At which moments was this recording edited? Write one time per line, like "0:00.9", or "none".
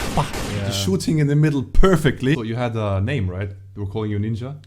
0:02.4